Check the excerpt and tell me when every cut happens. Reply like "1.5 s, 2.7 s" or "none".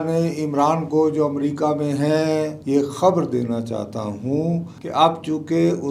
none